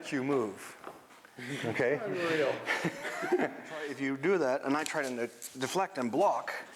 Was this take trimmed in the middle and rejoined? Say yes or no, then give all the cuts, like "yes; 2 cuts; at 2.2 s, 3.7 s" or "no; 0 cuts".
yes; 1 cut; at 3.9 s